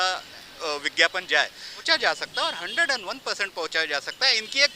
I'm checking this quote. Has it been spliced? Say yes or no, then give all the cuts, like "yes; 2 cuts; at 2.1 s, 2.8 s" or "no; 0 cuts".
yes; 1 cut; at 1.9 s